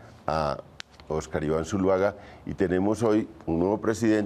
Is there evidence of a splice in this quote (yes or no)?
yes